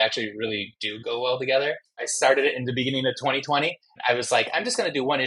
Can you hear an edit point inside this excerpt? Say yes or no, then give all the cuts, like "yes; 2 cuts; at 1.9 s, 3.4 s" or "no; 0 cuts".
yes; 1 cut; at 2.0 s